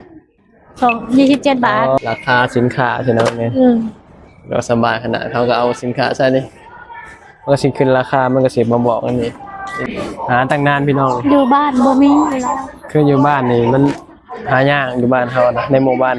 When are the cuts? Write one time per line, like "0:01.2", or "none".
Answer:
0:02.0